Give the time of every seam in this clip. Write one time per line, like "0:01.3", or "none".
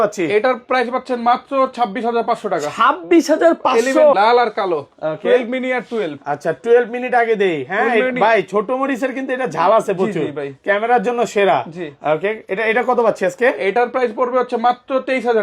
0:04.1